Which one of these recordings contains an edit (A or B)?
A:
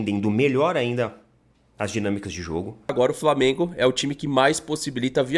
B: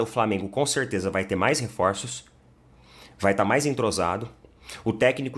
A